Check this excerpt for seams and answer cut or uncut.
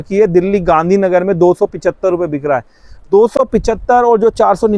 uncut